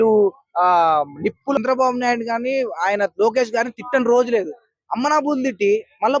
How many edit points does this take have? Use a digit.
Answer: 1